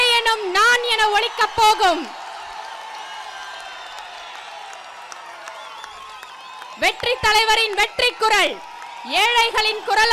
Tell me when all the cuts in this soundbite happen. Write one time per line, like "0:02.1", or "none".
none